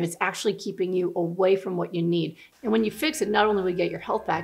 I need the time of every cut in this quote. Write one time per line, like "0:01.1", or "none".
0:02.4